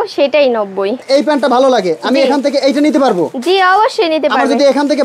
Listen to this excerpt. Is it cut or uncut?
cut